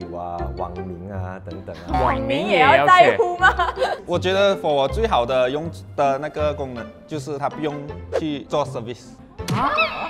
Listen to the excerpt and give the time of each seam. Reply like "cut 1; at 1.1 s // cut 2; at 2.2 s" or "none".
cut 1; at 4.0 s